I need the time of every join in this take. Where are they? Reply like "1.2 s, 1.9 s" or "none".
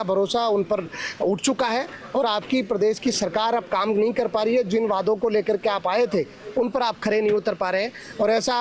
none